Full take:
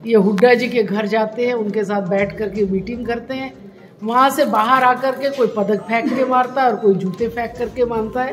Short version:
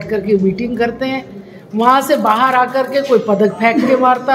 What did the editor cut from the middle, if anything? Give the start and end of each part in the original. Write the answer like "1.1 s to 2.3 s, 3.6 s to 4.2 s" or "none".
none